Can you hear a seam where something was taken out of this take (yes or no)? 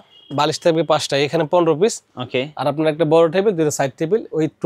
no